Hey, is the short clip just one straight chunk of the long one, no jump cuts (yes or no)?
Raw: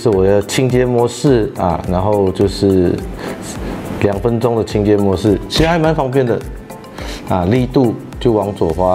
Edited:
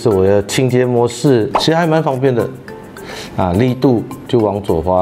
no